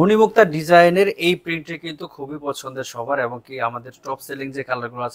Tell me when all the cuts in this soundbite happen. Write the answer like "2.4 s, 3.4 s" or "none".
none